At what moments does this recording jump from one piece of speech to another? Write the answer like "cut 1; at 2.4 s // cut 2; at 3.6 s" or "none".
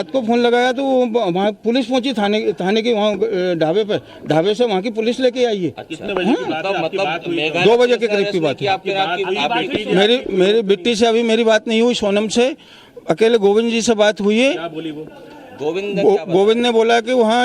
cut 1; at 5.4 s